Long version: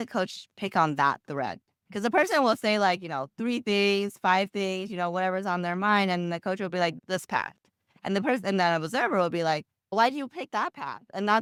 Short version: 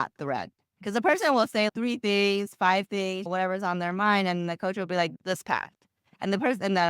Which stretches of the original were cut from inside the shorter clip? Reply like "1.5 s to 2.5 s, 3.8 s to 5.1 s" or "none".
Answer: 2.8 s to 3.3 s, 4.9 s to 5.1 s